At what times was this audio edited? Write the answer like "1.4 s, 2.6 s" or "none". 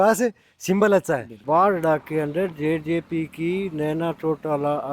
1.3 s

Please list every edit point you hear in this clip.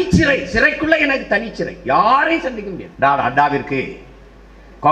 2.8 s

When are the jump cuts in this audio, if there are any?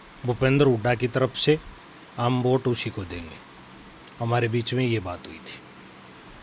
none

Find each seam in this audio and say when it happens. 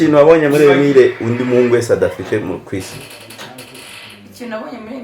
none

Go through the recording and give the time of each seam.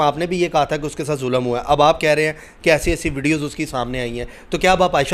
none

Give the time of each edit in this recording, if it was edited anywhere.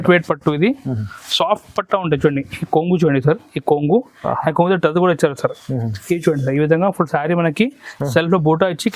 none

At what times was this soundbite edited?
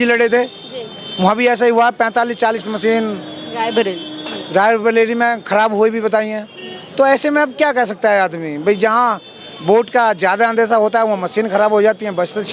none

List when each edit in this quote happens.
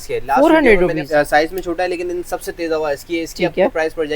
1.0 s

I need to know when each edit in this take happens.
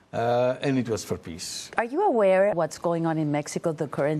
1.7 s, 2.6 s

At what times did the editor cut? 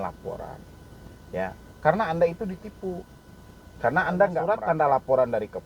4.5 s

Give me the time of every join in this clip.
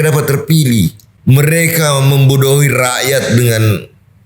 1.1 s

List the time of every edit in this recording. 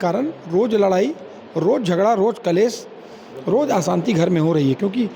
none

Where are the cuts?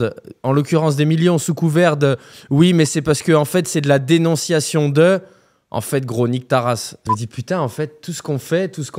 7.0 s

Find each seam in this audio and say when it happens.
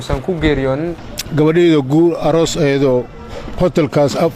1.1 s

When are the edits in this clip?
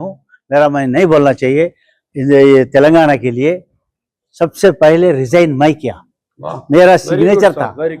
none

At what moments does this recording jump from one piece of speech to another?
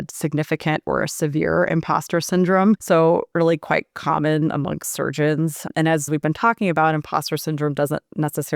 2.8 s, 5.7 s

